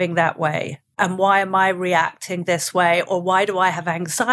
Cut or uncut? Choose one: cut